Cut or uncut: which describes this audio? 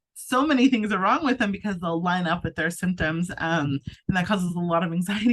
uncut